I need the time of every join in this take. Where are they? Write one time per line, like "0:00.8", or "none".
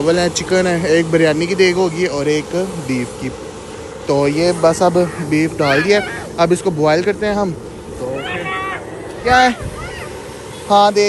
none